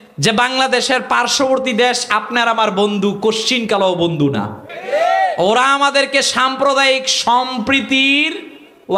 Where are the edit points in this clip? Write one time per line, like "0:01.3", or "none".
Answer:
0:04.7